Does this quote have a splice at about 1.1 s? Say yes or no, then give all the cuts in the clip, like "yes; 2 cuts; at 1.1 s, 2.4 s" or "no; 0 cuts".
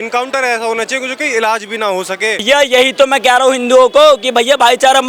no; 1 cut; at 2.4 s